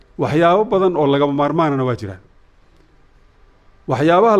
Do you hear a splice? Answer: no; 0 cuts

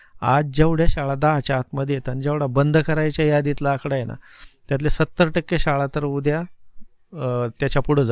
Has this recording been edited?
no; 0 cuts

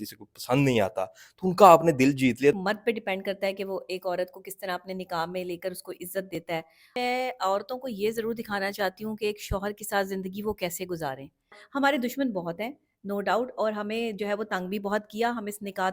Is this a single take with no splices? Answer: no; 3 cuts; at 2.6 s, 6.9 s, 11.6 s

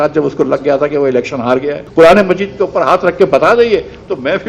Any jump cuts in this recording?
yes; 1 cut; at 1.8 s

